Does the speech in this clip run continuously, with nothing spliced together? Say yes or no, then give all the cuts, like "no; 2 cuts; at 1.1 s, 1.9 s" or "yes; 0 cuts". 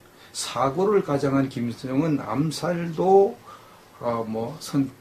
yes; 0 cuts